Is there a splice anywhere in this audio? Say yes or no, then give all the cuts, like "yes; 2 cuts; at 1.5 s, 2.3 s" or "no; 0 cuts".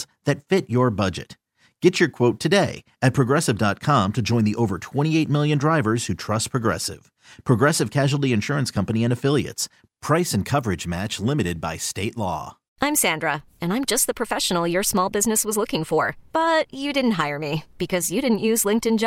yes; 1 cut; at 12.7 s